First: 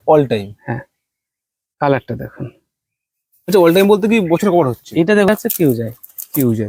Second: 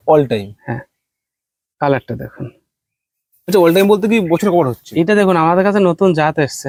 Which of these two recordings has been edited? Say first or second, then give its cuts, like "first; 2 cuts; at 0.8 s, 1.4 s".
first; 1 cut; at 5.3 s